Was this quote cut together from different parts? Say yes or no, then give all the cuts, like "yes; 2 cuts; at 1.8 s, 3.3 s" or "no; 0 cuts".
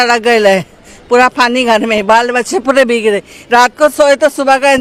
no; 0 cuts